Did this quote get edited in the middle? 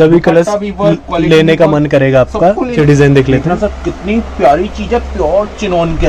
yes; 1 cut; at 2.8 s

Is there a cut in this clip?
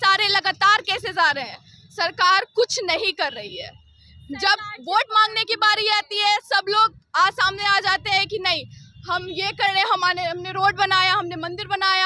no; 0 cuts

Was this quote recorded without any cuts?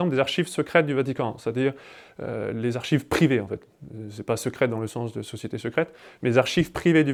yes; 0 cuts

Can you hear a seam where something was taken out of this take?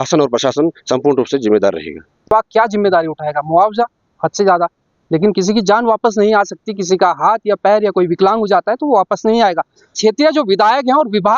yes; 2 cuts; at 2.2 s, 10.0 s

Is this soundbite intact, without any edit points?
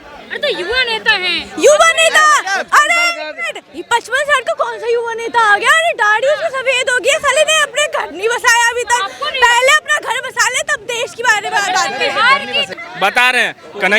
no; 1 cut; at 12.7 s

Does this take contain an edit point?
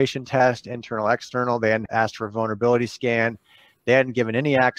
yes; 1 cut; at 1.8 s

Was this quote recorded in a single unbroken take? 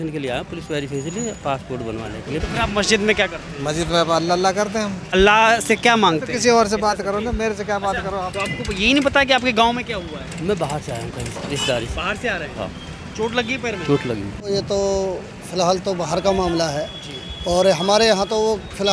no; 4 cuts; at 2.4 s, 5.1 s, 8.3 s, 14.5 s

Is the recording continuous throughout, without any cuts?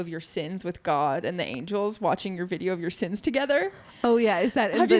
yes; 0 cuts

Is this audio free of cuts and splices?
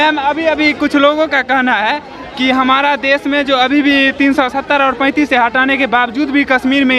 yes; 0 cuts

